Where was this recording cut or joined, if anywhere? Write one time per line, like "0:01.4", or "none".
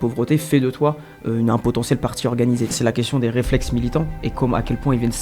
0:02.8